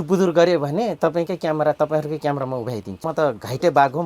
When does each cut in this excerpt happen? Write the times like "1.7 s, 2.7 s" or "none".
3.1 s